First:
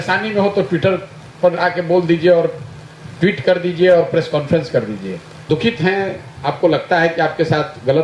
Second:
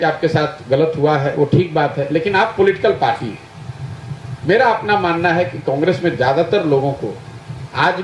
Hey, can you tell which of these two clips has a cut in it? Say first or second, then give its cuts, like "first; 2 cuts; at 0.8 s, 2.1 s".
first; 1 cut; at 5.3 s